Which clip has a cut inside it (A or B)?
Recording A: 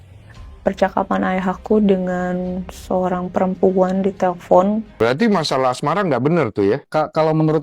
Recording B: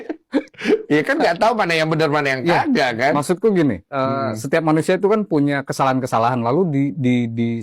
A